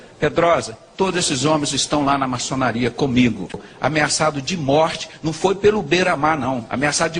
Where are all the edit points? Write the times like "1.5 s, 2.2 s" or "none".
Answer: 3.6 s